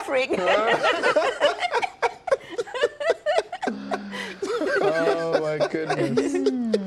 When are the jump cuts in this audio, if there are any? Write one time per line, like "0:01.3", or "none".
0:02.1